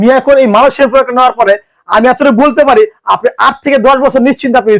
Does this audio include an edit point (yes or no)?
no